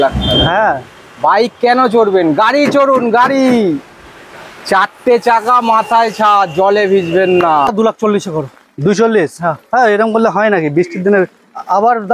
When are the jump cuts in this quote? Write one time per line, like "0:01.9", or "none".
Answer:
0:07.7